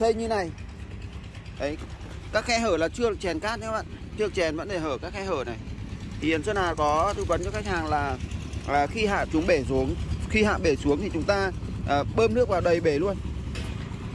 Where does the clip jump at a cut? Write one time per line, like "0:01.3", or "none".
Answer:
none